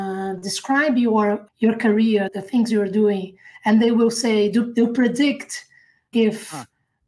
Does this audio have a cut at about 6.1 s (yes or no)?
yes